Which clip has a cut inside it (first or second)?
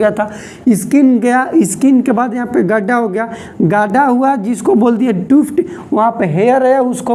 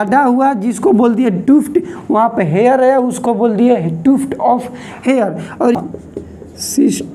second